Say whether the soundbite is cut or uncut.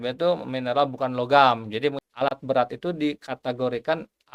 cut